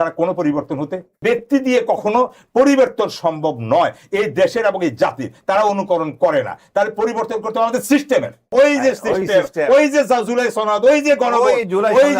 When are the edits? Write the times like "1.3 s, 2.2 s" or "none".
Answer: 1.2 s, 8.5 s